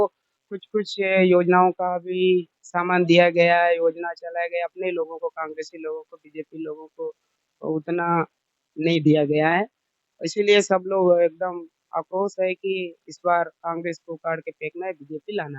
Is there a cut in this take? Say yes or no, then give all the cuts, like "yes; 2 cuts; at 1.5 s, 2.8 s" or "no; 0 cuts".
no; 0 cuts